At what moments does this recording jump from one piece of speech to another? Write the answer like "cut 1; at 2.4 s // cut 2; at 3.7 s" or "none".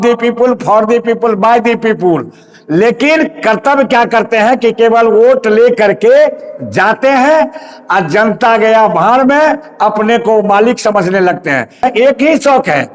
cut 1; at 11.8 s